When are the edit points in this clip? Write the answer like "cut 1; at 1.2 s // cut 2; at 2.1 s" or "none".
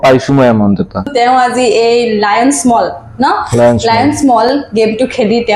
cut 1; at 1.1 s